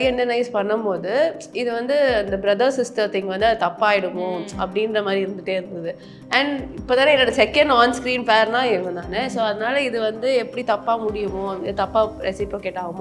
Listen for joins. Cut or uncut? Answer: uncut